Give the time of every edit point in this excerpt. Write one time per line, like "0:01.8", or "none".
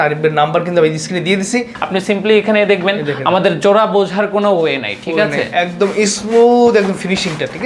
0:01.8